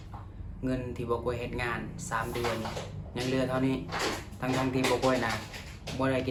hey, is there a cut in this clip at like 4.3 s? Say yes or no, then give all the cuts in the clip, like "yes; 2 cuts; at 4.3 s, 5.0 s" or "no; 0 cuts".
no; 0 cuts